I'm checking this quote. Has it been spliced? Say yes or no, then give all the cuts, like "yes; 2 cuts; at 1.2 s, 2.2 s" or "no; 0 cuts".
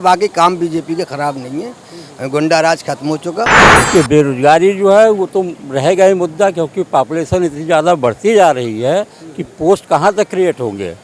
yes; 1 cut; at 3.7 s